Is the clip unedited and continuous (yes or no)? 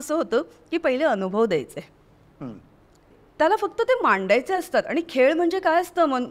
no